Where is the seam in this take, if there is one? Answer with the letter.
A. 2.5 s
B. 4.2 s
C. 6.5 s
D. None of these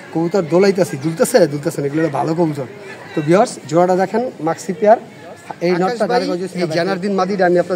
C